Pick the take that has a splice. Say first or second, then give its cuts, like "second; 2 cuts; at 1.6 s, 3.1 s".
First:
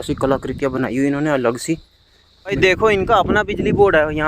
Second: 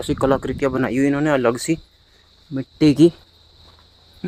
first; 1 cut; at 2.6 s